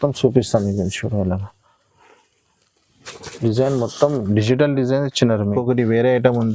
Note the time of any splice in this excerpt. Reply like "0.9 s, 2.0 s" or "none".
5.6 s

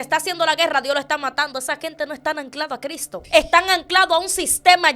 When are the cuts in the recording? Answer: 3.1 s

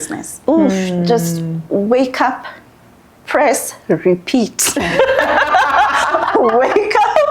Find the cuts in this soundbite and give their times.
none

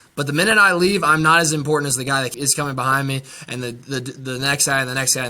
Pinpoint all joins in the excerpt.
2.3 s

